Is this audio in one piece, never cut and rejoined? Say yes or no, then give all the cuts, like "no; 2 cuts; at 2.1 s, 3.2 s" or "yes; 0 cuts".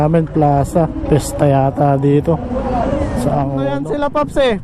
no; 1 cut; at 3.6 s